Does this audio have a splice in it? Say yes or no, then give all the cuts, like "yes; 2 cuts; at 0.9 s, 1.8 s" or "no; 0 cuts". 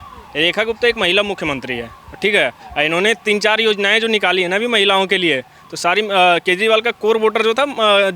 no; 0 cuts